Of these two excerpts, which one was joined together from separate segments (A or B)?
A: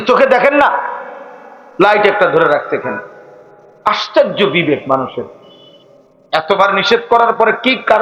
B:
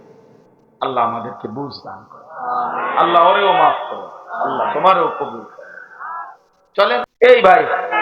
B